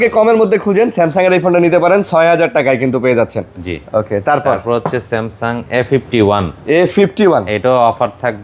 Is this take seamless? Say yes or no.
yes